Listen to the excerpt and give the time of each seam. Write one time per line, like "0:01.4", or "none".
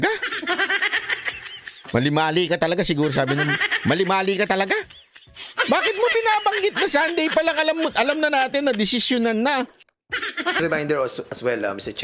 0:10.6